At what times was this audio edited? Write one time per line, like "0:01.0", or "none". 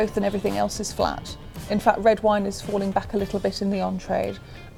none